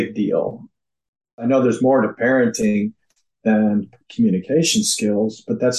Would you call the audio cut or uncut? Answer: cut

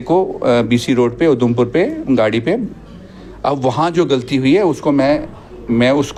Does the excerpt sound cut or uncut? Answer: uncut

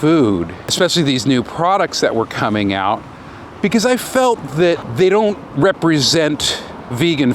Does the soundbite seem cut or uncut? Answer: cut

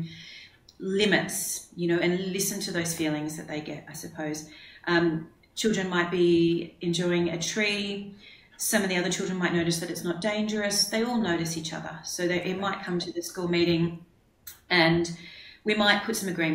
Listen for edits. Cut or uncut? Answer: uncut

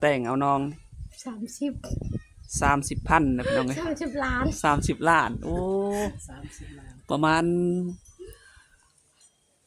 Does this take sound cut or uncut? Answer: uncut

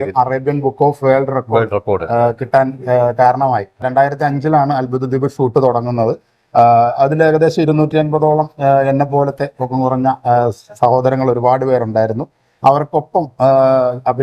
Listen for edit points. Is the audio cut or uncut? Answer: cut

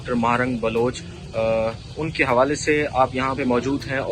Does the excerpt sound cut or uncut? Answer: uncut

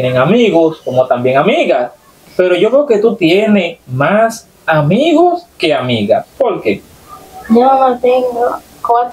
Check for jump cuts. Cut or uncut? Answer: uncut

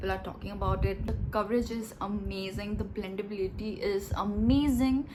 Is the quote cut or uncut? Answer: uncut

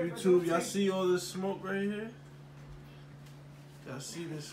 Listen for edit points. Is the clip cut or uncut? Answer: uncut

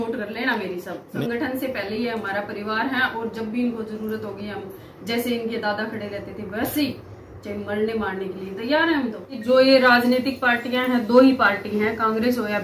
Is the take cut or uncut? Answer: cut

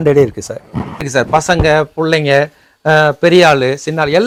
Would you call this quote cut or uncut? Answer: uncut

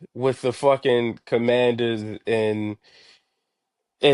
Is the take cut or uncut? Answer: uncut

